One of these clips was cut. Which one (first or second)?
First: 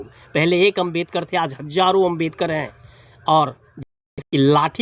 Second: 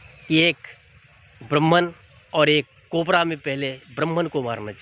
first